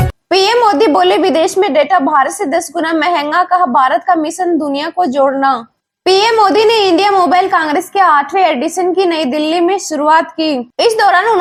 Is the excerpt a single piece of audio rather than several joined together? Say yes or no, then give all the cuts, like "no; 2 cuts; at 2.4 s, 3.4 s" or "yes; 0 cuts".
yes; 0 cuts